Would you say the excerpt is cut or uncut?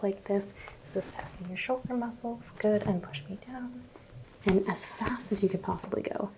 cut